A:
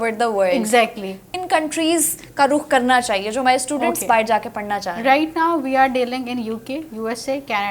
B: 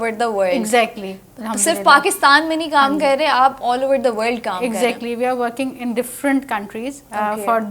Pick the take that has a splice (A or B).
A